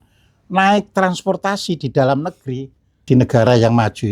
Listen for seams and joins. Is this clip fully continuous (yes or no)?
no